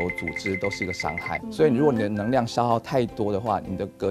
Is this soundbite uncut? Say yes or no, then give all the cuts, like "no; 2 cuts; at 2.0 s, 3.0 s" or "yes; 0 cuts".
no; 1 cut; at 1.4 s